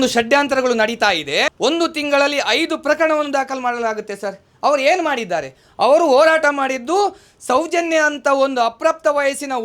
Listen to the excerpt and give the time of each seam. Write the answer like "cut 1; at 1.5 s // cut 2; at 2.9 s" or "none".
cut 1; at 1.5 s